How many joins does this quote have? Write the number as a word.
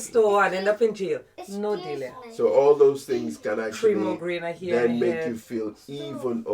one